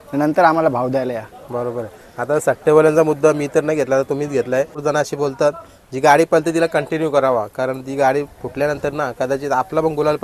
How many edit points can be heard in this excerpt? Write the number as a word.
one